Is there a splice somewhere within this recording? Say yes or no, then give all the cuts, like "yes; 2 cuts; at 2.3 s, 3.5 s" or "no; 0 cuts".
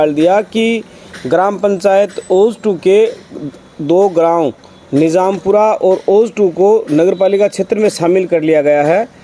no; 0 cuts